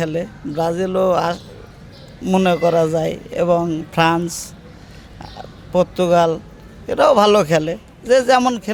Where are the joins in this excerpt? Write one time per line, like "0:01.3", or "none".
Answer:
none